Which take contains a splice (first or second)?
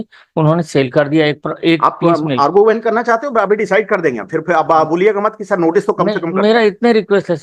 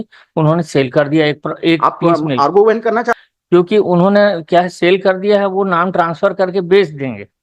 second